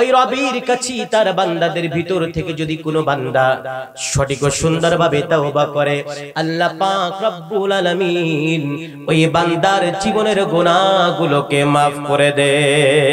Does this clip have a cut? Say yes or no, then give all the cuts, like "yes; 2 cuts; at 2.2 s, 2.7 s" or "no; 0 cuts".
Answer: no; 0 cuts